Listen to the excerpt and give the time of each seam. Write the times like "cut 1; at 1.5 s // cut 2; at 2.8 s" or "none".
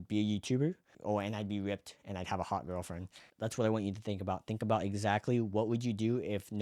cut 1; at 1.0 s // cut 2; at 3.2 s

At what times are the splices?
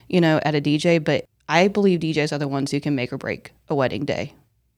cut 1; at 1.3 s

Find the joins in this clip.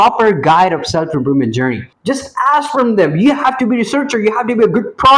cut 1; at 1.9 s

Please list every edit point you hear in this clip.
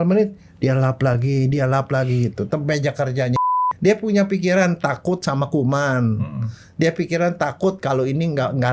cut 1; at 3.4 s

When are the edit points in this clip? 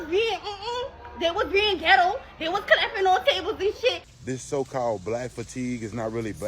cut 1; at 4.1 s

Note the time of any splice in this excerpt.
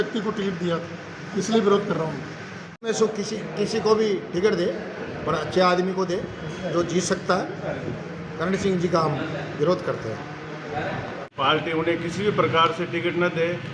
cut 1; at 2.9 s // cut 2; at 11.2 s

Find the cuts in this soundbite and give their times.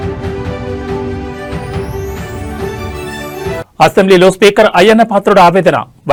none

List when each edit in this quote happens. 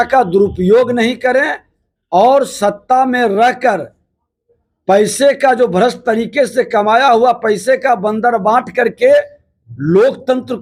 none

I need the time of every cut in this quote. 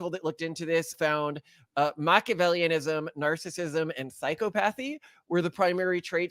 cut 1; at 0.9 s

